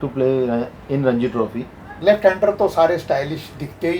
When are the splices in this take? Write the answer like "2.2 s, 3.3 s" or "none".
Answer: 1.9 s

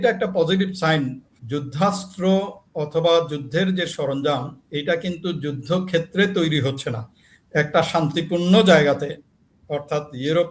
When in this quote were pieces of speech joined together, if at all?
1.2 s

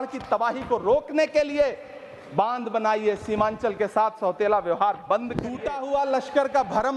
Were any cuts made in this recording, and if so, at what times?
5.7 s

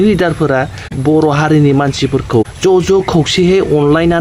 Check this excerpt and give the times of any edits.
1.0 s, 2.5 s

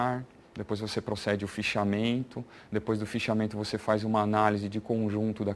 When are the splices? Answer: none

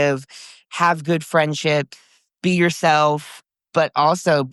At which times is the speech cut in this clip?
2.2 s, 3.3 s

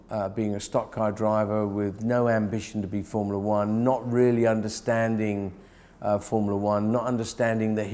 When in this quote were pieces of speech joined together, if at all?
none

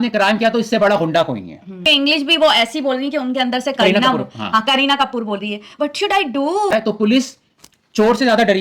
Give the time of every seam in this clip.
1.8 s, 6.7 s

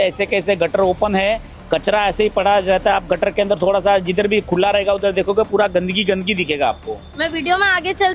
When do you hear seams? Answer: none

